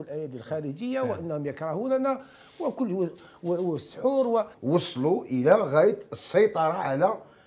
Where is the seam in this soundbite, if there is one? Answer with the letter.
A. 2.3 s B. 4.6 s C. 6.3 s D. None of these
B